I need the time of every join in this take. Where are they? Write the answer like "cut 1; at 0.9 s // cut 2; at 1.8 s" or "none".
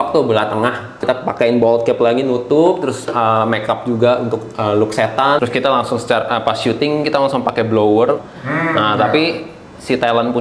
cut 1; at 1.0 s // cut 2; at 5.4 s // cut 3; at 8.3 s